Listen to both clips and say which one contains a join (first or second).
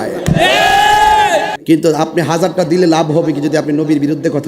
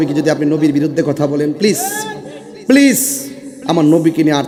first